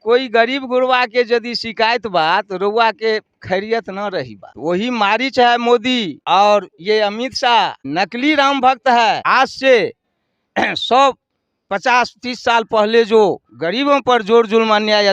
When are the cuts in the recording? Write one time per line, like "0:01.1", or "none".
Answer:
0:04.4
0:06.1
0:07.8
0:09.2